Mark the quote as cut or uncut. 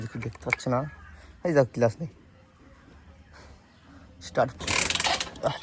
cut